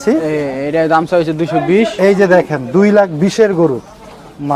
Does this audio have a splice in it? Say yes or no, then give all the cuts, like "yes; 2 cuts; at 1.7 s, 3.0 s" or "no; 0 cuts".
no; 0 cuts